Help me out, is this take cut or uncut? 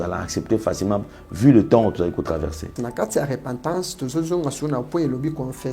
cut